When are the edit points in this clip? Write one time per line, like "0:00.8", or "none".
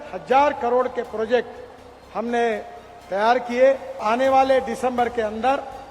0:04.0